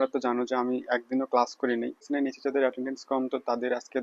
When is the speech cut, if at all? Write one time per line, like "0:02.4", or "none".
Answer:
0:02.0